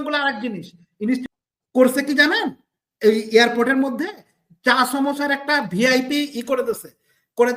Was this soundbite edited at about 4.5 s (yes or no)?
no